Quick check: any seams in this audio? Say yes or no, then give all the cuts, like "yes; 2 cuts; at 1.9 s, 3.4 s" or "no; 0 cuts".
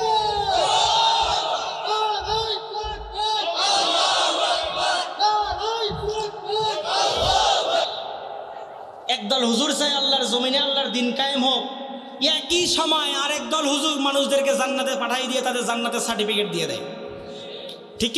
yes; 1 cut; at 8.6 s